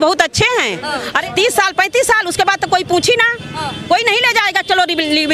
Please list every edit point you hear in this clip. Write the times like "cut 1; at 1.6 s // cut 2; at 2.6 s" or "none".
cut 1; at 1.2 s